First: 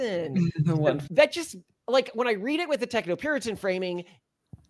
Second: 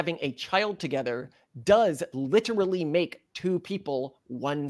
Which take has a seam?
first; 1 cut; at 1.0 s

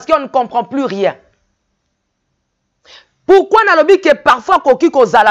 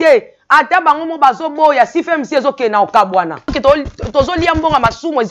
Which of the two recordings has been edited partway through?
second; 1 cut; at 3.5 s

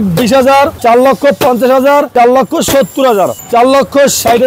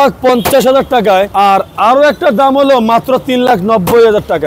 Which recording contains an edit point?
first; 3 cuts; at 0.8 s, 2.1 s, 3.4 s

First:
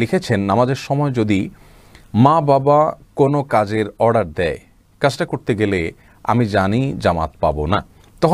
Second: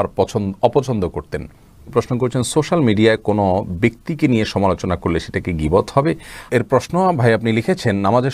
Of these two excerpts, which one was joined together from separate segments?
second; 2 cuts; at 1.9 s, 6.4 s

